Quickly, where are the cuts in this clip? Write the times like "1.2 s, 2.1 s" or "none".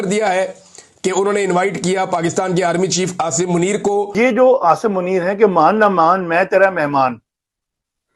4.3 s